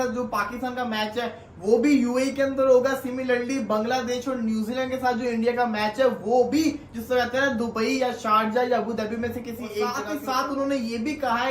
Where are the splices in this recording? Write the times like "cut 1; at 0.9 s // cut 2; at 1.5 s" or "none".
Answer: cut 1; at 10.1 s